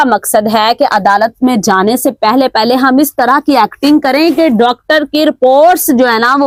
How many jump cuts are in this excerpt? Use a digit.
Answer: 0